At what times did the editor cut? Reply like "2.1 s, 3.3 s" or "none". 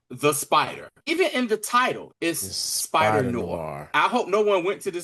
1.0 s, 2.1 s, 3.8 s